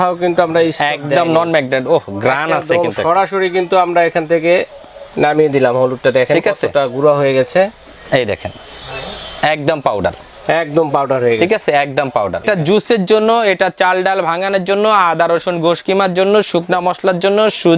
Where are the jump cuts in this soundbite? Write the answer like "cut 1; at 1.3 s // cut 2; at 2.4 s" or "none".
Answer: cut 1; at 12.4 s